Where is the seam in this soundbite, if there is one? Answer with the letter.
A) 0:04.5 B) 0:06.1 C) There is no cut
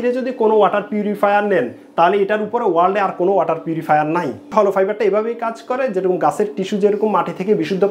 A